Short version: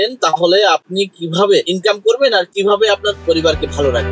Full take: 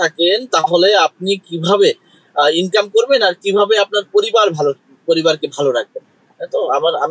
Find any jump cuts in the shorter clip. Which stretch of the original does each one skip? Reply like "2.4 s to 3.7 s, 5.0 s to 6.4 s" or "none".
2.0 s to 2.6 s, 4.1 s to 5.0 s